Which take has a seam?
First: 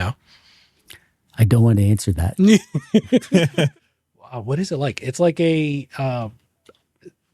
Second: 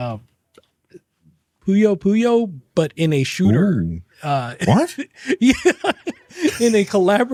first; 1 cut; at 3.7 s

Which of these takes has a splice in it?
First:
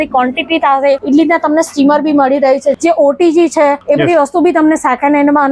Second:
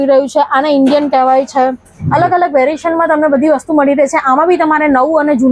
first; 3 cuts; at 1.0 s, 2.8 s, 3.8 s

